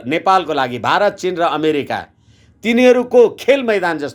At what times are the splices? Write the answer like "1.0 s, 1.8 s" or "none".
none